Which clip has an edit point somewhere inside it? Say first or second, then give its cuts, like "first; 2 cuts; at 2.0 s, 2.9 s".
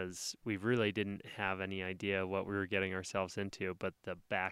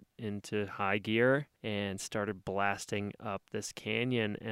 second; 1 cut; at 1.5 s